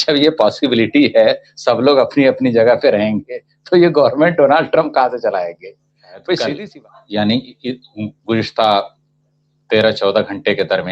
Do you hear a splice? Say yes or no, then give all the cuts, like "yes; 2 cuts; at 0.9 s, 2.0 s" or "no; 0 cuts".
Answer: yes; 1 cut; at 6.6 s